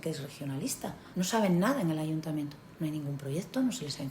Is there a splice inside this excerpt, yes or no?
yes